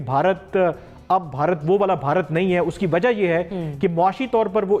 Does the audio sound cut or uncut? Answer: uncut